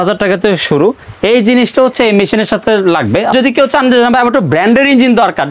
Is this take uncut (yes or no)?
no